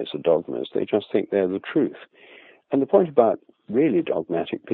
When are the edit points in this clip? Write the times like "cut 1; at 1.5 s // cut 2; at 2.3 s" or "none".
none